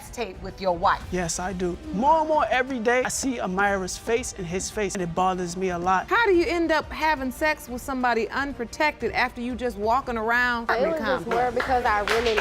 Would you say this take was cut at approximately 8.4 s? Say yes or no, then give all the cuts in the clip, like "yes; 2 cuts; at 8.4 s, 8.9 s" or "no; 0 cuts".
no; 1 cut; at 6.1 s